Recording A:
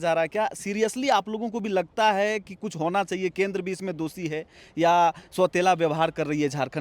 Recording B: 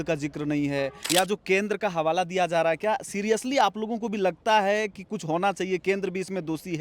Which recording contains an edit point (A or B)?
B